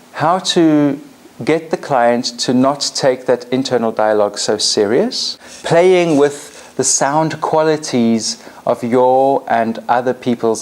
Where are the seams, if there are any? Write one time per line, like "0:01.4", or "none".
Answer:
0:05.5